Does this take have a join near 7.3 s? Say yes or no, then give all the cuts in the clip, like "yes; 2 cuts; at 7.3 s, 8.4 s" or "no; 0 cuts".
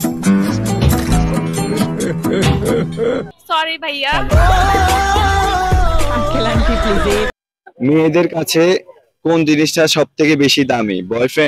yes; 1 cut; at 7.3 s